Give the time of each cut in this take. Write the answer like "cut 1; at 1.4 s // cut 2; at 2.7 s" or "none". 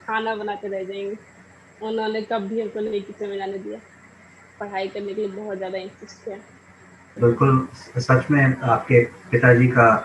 cut 1; at 7.1 s